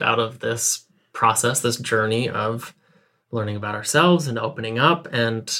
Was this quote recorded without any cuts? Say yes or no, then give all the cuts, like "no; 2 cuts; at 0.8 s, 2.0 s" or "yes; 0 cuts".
yes; 0 cuts